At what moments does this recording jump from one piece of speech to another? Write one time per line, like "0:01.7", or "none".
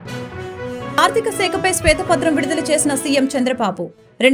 0:01.0